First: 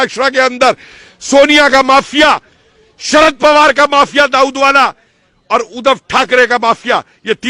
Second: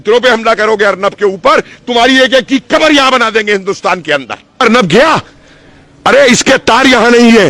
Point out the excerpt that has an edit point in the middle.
second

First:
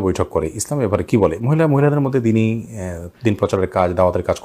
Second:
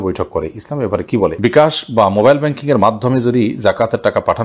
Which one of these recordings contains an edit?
second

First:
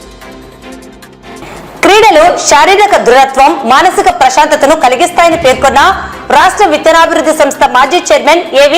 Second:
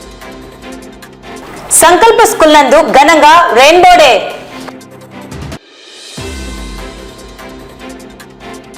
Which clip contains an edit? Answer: first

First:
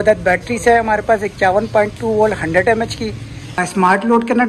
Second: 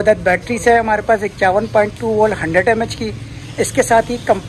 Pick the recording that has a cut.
first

